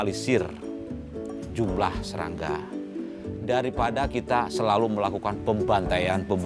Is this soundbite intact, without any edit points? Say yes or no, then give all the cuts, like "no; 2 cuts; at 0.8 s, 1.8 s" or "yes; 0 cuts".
yes; 0 cuts